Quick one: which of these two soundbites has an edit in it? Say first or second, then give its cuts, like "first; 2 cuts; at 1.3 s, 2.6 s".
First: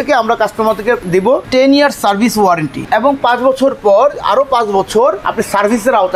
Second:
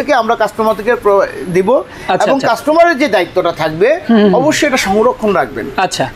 first; 3 cuts; at 1.0 s, 2.8 s, 5.2 s